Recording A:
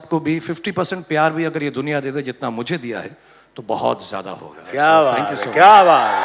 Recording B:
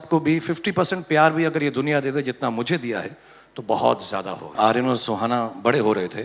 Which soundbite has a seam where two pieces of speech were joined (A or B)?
B